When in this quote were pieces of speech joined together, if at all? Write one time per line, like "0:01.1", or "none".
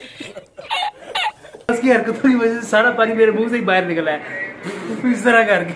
0:01.7